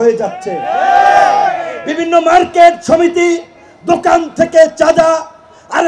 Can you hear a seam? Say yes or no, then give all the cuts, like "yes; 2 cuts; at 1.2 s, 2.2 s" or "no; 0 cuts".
no; 0 cuts